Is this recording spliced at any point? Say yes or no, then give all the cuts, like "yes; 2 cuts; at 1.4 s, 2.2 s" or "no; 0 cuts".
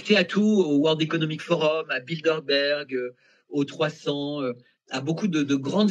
no; 0 cuts